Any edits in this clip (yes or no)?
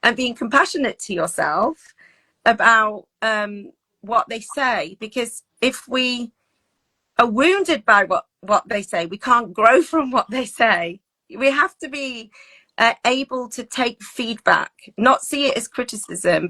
no